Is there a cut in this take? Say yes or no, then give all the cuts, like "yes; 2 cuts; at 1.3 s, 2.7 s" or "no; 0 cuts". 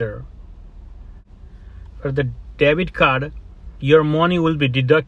yes; 1 cut; at 1.3 s